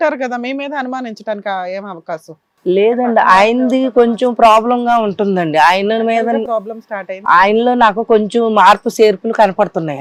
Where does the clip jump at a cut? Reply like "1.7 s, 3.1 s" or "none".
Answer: none